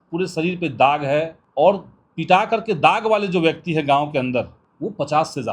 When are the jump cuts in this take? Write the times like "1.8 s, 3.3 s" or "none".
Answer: 1.4 s, 4.6 s